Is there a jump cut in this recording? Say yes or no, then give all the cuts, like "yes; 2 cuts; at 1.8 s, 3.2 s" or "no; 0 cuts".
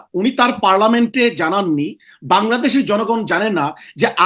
no; 0 cuts